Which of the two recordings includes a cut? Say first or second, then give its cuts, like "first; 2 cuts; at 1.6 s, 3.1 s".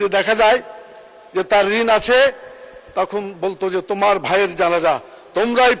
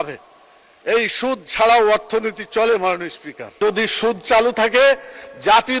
second; 1 cut; at 3.6 s